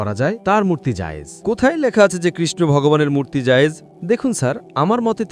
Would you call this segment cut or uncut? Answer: cut